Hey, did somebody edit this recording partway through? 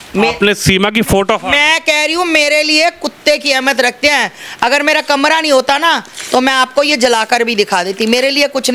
no; 0 cuts

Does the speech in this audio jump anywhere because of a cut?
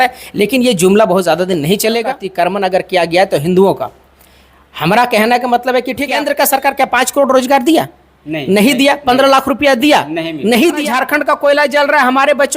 yes; 3 cuts; at 2.2 s, 6.2 s, 10.9 s

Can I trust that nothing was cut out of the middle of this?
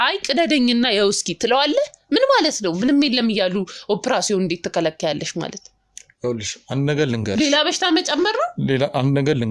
yes; 0 cuts

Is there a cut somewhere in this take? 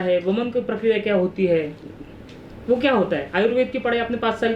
no; 0 cuts

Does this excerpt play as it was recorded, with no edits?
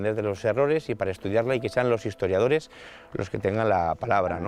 yes; 0 cuts

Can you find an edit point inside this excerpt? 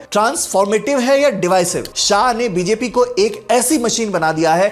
yes; 1 cut; at 1.9 s

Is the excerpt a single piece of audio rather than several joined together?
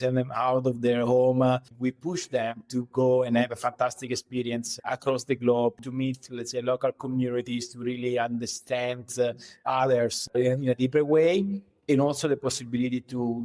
no; 3 cuts; at 1.7 s, 5.8 s, 10.3 s

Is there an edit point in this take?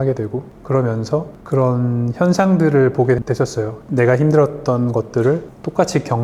no; 0 cuts

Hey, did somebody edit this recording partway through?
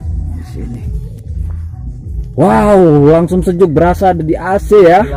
no; 0 cuts

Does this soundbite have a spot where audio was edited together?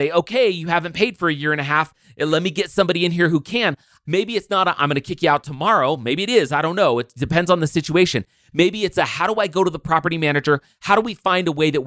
yes; 2 cuts; at 2.3 s, 3.9 s

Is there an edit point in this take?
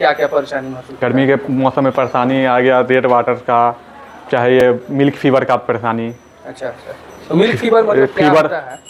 no; 0 cuts

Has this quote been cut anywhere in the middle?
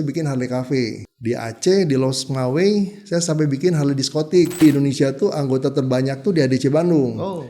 yes; 2 cuts; at 1.0 s, 4.6 s

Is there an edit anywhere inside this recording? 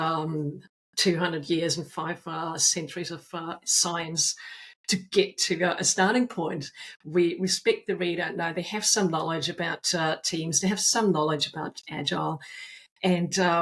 no; 0 cuts

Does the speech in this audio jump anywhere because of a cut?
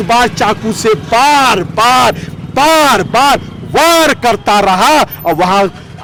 no; 0 cuts

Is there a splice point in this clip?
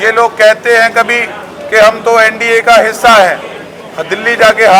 no; 0 cuts

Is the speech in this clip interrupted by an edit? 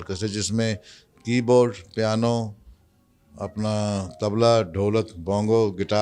no; 0 cuts

